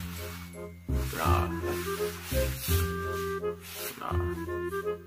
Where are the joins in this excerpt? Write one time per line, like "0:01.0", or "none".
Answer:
0:01.2